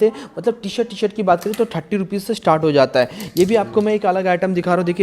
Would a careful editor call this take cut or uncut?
uncut